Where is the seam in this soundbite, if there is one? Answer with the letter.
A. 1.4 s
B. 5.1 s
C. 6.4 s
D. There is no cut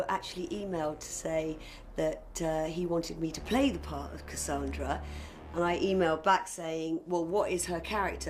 B